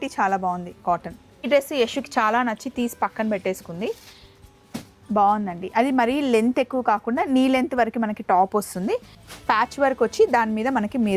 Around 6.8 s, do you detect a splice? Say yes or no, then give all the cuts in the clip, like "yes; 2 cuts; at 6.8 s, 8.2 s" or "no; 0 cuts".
no; 2 cuts; at 1.5 s, 9.2 s